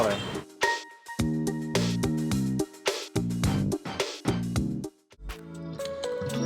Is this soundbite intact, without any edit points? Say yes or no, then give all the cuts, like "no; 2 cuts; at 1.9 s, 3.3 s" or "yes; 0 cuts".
no; 1 cut; at 5.1 s